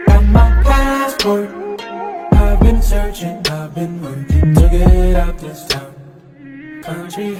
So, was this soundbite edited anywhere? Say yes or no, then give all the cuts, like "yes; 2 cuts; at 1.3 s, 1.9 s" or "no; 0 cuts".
no; 0 cuts